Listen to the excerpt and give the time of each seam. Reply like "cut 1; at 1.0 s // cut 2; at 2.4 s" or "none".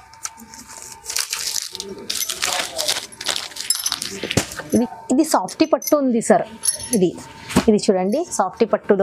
cut 1; at 4.6 s